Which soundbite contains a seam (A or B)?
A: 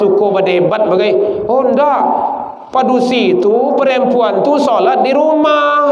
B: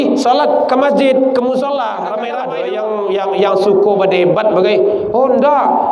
B